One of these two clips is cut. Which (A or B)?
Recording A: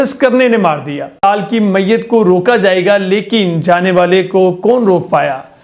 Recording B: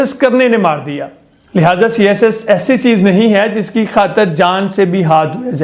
A